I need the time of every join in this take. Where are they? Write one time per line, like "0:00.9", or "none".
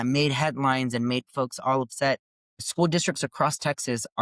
0:02.3

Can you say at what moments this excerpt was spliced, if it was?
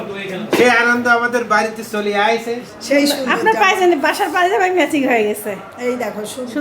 0:02.6

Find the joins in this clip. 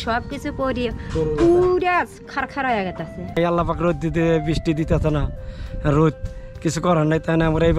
0:03.4

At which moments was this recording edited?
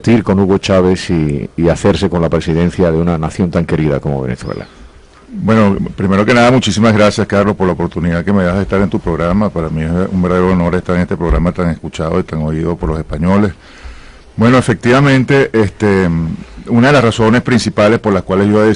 0:02.3

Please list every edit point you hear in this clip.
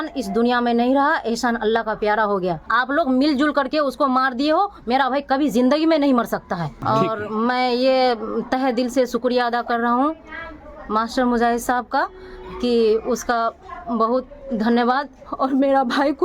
0:02.6
0:06.7

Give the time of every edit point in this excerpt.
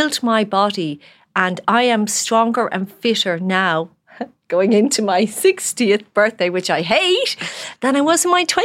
0:07.7

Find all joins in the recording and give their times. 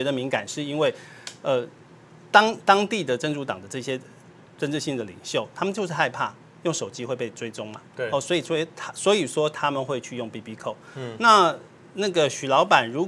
none

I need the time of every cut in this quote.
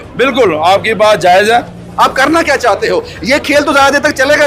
0:01.8

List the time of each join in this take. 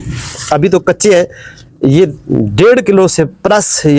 none

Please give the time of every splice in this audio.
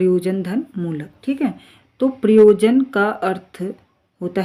none

